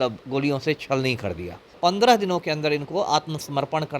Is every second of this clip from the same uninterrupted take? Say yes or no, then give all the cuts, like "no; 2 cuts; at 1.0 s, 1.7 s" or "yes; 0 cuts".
no; 1 cut; at 1.8 s